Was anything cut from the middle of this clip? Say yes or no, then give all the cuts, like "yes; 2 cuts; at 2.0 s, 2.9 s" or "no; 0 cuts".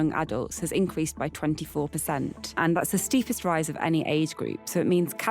yes; 1 cut; at 2.4 s